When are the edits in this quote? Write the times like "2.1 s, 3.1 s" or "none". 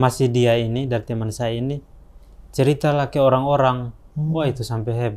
none